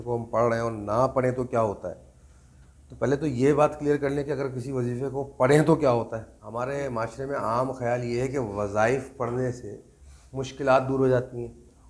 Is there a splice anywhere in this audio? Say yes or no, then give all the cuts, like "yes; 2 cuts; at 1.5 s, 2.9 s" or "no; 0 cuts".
yes; 1 cut; at 6.4 s